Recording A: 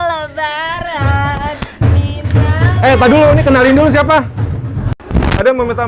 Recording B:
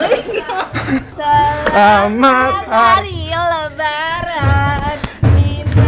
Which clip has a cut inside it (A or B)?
A